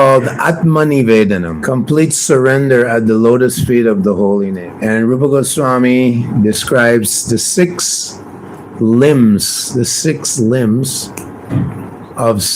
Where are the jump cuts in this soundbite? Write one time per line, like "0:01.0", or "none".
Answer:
0:01.5